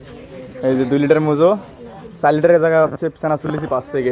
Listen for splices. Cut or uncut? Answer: uncut